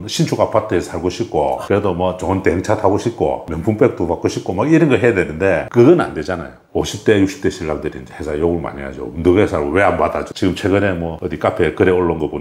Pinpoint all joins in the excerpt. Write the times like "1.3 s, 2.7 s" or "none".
6.6 s, 10.2 s